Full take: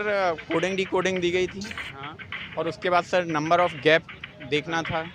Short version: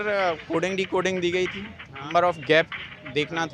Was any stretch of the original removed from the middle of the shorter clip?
yes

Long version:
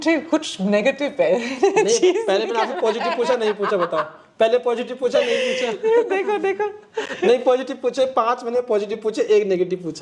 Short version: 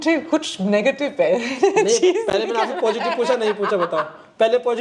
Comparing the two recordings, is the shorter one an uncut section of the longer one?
yes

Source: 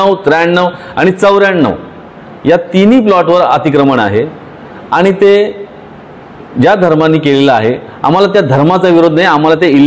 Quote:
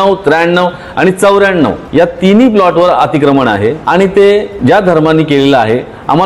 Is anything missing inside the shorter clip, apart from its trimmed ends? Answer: yes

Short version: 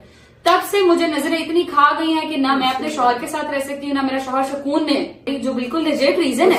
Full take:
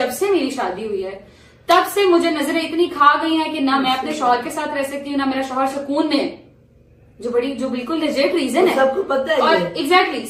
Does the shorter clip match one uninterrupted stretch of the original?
no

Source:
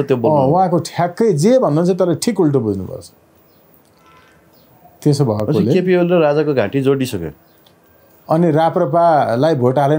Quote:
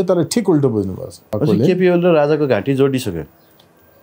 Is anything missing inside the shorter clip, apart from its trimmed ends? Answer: yes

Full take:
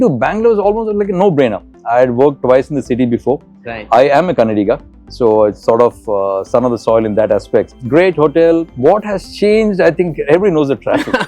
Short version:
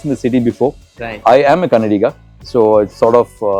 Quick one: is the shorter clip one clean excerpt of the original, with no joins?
yes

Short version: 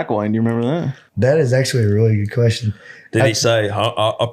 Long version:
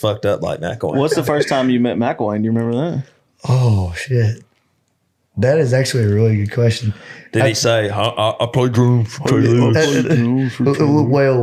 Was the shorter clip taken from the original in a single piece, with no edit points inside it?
no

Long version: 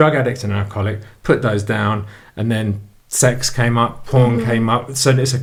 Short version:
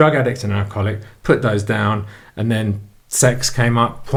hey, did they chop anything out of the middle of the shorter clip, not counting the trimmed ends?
no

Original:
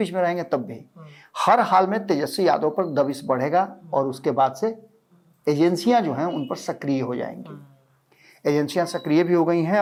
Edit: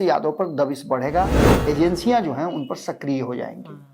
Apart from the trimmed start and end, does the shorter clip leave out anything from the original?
yes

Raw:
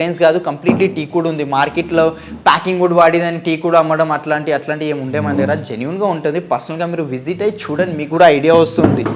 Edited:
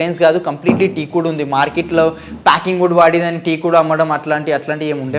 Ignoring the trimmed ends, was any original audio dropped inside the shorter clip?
no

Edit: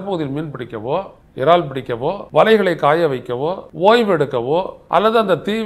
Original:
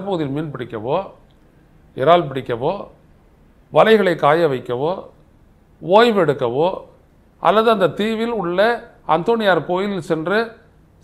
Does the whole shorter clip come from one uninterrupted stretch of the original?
no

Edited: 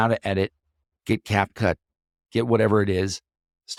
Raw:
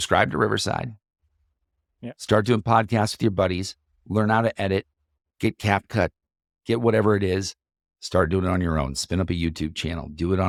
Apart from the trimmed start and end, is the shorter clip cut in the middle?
no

